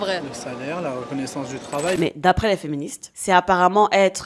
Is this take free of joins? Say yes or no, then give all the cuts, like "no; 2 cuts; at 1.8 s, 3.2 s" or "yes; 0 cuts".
no; 1 cut; at 2.0 s